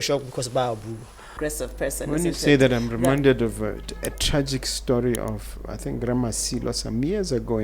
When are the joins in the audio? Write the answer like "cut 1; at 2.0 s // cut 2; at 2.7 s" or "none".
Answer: cut 1; at 1.3 s